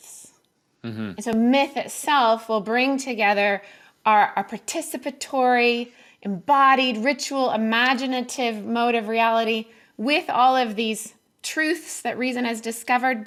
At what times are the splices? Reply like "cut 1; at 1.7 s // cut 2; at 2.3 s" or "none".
none